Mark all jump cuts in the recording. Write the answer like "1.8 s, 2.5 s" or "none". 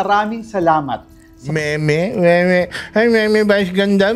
none